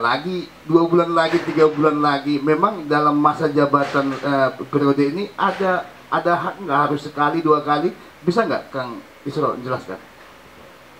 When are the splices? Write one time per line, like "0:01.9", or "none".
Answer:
none

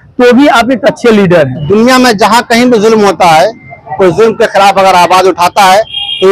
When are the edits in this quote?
0:01.6

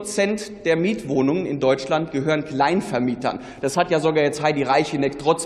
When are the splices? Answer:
none

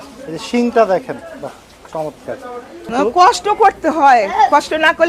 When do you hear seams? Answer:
0:02.8

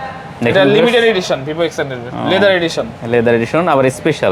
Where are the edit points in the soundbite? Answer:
none

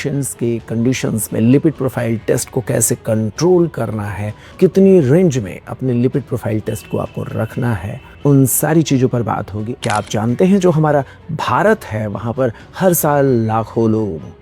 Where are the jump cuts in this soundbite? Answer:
0:09.6

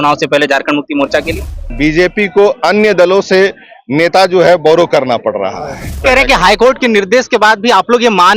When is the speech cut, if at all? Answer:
0:01.7
0:06.0

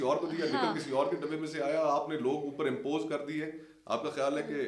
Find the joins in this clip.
none

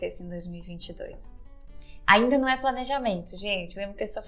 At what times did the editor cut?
none

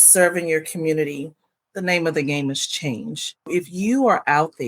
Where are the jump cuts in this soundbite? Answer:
0:03.5

